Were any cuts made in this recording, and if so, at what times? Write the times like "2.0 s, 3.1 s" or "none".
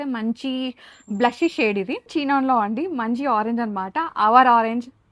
2.1 s